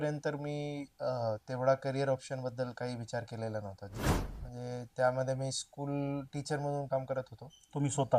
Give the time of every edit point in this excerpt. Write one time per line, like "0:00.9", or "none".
0:04.0